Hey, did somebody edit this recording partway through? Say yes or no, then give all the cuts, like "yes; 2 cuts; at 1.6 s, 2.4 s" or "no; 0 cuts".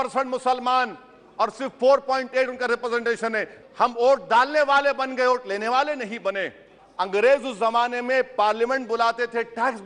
yes; 2 cuts; at 3.6 s, 6.8 s